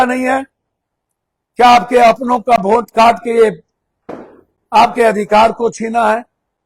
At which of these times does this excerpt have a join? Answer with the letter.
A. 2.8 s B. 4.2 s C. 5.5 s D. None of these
D